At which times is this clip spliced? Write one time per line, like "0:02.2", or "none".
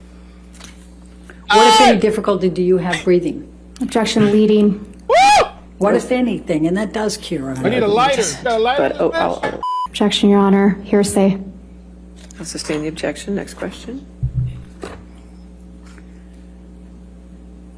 0:09.8